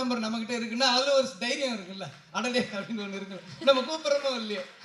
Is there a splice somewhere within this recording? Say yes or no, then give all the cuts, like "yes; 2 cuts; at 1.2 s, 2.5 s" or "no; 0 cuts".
no; 0 cuts